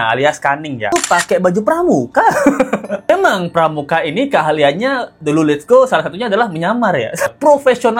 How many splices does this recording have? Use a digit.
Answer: 3